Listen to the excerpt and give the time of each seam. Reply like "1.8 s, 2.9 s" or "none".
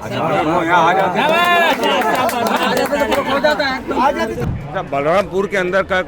4.4 s